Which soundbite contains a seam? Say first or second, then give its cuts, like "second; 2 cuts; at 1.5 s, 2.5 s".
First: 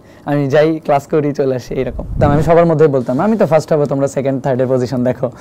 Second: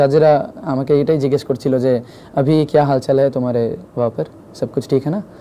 first; 1 cut; at 2.2 s